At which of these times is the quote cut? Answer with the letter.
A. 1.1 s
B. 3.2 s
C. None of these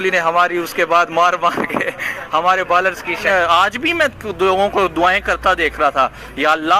B